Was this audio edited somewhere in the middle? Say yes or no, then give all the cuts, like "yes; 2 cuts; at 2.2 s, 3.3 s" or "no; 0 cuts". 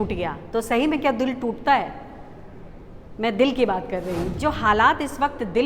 yes; 1 cut; at 4.4 s